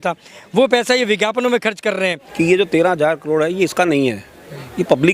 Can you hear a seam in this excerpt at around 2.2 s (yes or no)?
yes